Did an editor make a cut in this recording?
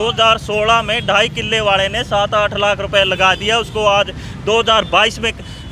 no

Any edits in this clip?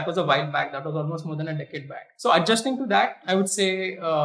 yes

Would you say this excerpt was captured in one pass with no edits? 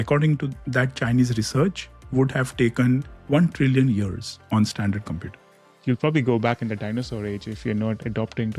no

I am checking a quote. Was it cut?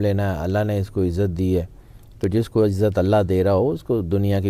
no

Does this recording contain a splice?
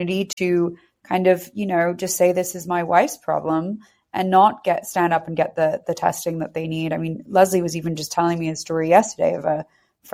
no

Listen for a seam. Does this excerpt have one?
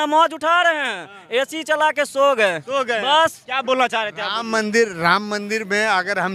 no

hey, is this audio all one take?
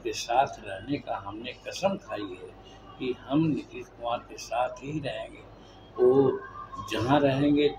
yes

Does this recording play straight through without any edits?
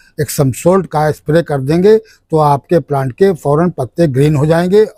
yes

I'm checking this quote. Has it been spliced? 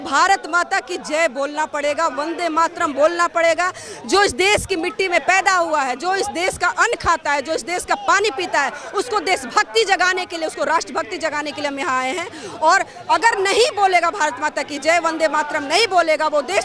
no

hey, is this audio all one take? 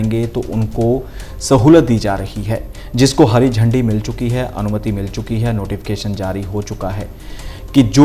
yes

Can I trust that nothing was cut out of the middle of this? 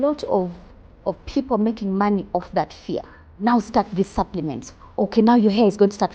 no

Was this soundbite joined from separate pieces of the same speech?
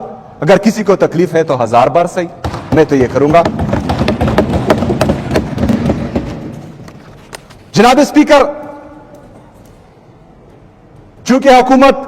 no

